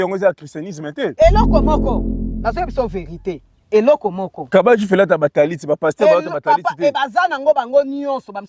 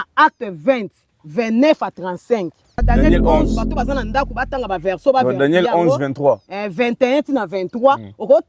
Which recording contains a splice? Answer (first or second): second